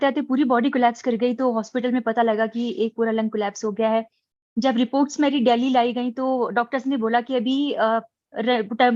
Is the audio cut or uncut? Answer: uncut